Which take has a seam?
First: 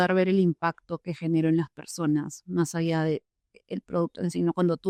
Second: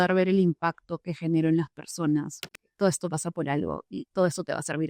second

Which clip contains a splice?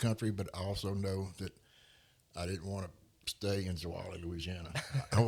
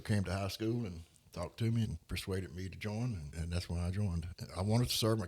second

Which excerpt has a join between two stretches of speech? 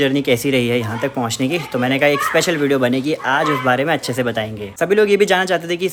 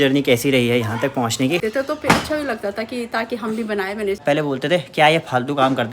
second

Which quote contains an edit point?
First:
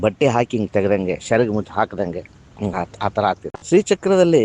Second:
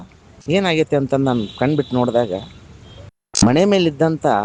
first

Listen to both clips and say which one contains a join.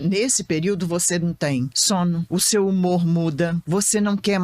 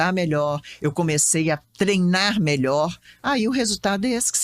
first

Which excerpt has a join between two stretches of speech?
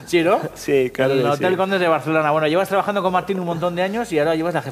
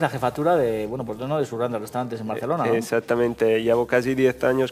first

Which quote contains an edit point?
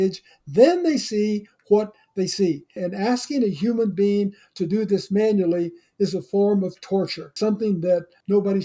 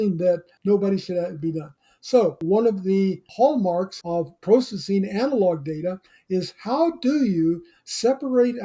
second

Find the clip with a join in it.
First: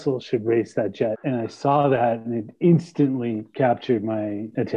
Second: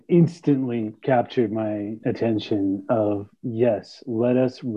first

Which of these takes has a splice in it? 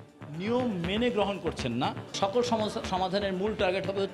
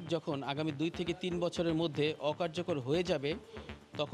first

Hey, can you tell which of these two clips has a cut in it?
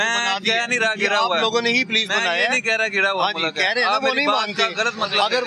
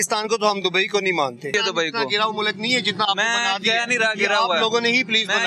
second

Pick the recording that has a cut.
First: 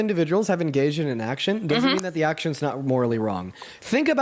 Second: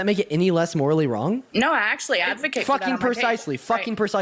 second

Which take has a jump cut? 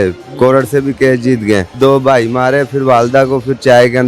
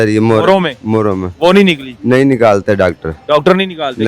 first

